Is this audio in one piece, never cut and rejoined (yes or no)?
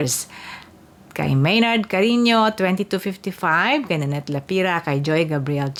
yes